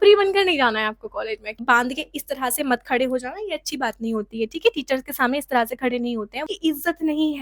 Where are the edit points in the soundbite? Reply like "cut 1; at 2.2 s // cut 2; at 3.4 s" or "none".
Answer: cut 1; at 1.5 s // cut 2; at 6.4 s

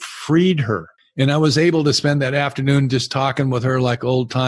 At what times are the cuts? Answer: cut 1; at 1.0 s

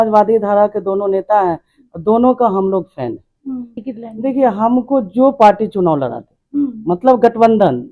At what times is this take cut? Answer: cut 1; at 3.8 s

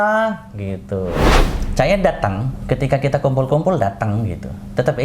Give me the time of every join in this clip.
cut 1; at 1.4 s

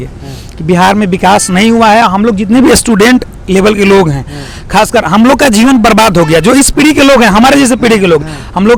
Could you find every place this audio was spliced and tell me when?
none

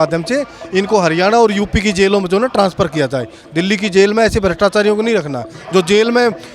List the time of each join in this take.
none

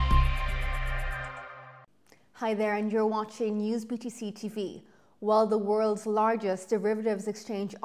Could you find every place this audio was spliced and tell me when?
cut 1; at 1.5 s

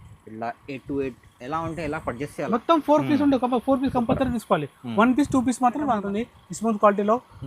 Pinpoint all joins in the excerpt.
cut 1; at 6.0 s

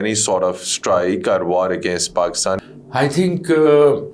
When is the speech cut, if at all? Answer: cut 1; at 2.6 s

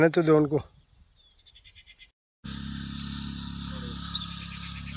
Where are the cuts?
cut 1; at 2.3 s

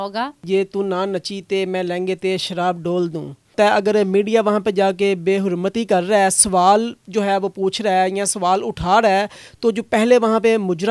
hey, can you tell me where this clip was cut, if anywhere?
cut 1; at 3.5 s

